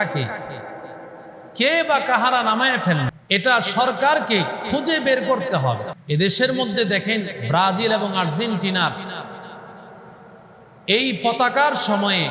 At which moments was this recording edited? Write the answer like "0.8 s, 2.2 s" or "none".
3.1 s, 5.9 s